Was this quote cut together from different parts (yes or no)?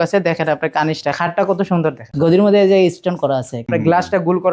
yes